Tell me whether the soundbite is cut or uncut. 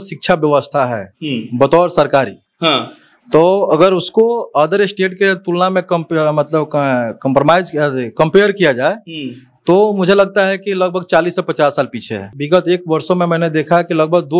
cut